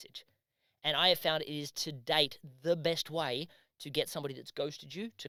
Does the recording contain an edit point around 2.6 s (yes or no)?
no